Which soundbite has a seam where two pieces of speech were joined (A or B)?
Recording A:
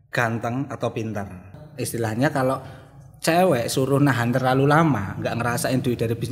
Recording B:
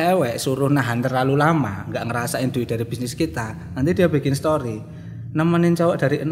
A